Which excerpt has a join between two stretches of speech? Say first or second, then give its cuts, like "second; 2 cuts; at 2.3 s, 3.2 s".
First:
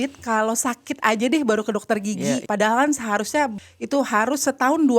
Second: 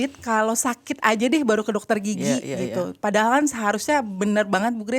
first; 2 cuts; at 2.4 s, 3.6 s